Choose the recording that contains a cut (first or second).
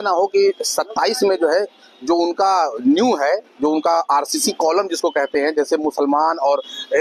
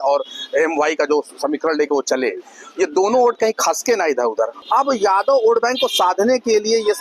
second